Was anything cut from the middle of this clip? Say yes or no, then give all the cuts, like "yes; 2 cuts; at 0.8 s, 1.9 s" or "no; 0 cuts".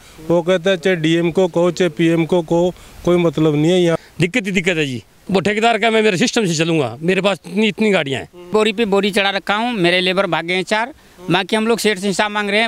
yes; 2 cuts; at 4.0 s, 8.5 s